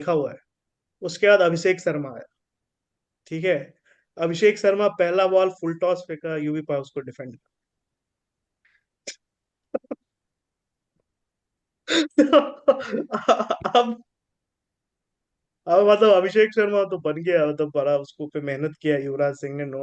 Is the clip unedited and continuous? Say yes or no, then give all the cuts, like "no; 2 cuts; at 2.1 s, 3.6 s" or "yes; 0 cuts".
yes; 0 cuts